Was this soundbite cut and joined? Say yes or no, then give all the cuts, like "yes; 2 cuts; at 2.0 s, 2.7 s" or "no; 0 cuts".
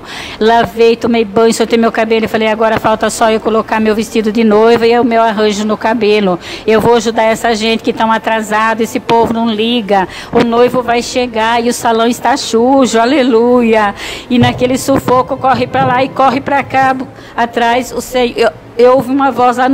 no; 0 cuts